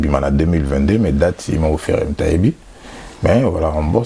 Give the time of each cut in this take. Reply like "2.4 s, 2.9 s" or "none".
none